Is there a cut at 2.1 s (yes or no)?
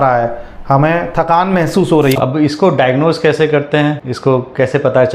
yes